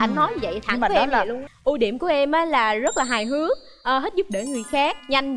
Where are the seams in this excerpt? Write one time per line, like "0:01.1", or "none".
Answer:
0:01.5